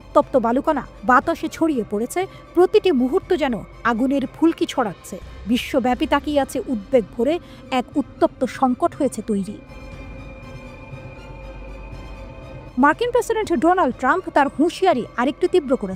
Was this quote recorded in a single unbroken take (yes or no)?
yes